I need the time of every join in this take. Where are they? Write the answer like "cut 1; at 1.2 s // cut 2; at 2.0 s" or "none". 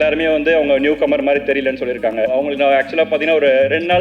cut 1; at 2.3 s